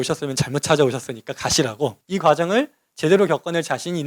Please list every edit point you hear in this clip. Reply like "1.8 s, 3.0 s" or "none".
2.0 s